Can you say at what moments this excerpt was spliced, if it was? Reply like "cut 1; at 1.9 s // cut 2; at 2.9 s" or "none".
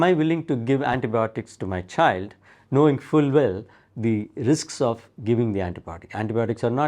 none

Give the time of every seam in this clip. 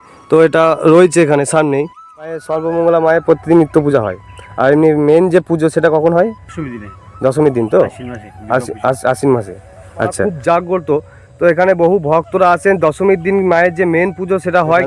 cut 1; at 2.5 s // cut 2; at 6.5 s // cut 3; at 10.3 s

